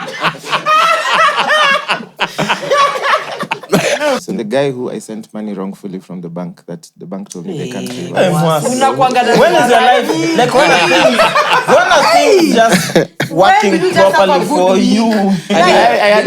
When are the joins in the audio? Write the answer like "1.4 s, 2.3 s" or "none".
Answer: 4.2 s